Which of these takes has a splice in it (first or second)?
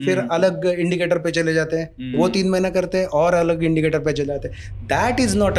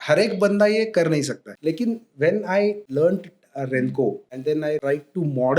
second